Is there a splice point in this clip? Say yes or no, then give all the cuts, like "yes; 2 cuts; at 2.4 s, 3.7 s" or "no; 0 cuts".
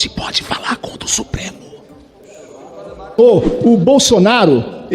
yes; 1 cut; at 3.2 s